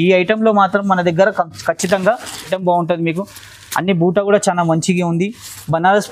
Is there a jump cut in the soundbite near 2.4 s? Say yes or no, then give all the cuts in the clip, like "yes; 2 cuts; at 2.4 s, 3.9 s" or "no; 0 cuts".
yes; 1 cut; at 2.4 s